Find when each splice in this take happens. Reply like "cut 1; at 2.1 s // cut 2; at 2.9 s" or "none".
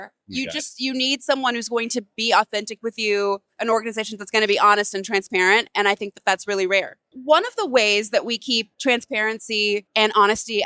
cut 1; at 7.1 s // cut 2; at 8.7 s // cut 3; at 9.9 s

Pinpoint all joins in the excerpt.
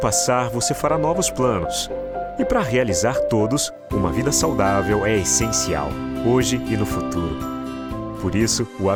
none

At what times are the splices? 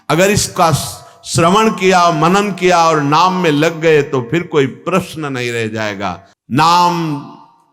cut 1; at 6.3 s

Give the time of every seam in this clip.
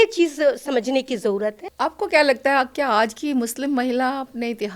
cut 1; at 1.6 s

